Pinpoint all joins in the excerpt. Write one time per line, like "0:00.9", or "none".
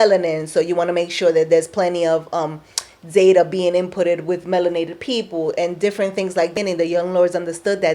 none

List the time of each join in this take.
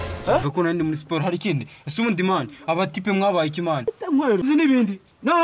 0:03.9

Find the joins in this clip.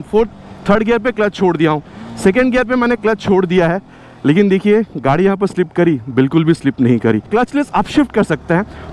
0:07.3

